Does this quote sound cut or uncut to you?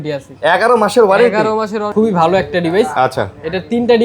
cut